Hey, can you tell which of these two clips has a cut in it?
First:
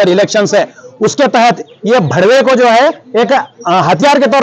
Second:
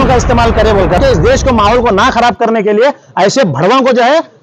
second; 1 cut; at 1.0 s

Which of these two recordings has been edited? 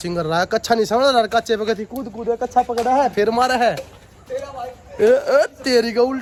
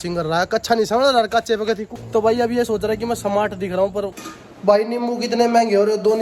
second; 2 cuts; at 1.9 s, 4.1 s

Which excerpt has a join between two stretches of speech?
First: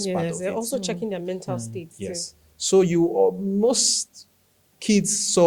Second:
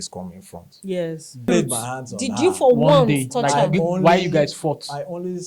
second; 1 cut; at 1.5 s

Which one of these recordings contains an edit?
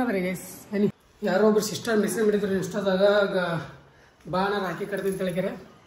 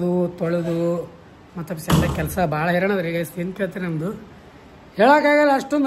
first; 1 cut; at 1.1 s

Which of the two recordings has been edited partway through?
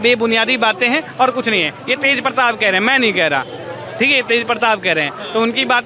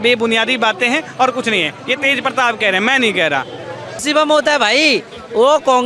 second; 1 cut; at 4.0 s

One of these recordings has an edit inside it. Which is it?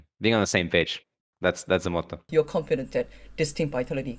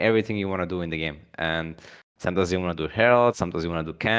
first; 1 cut; at 2.3 s

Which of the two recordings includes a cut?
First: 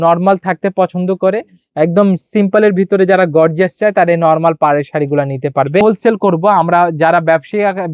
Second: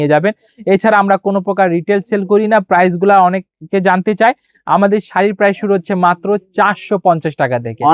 first; 1 cut; at 5.8 s

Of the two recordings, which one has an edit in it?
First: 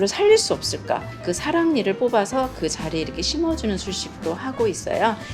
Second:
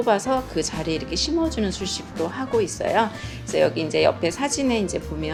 first; 1 cut; at 1.1 s

